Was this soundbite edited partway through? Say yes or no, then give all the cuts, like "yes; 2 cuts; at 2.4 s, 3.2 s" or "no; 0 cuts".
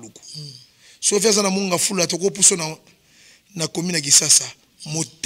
no; 0 cuts